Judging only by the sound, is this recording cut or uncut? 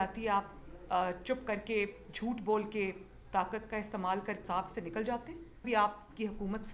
cut